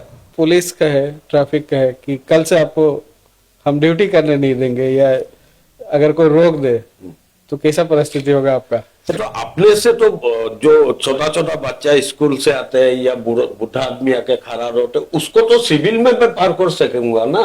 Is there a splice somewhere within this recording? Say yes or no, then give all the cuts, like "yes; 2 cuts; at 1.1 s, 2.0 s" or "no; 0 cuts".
yes; 1 cut; at 9.1 s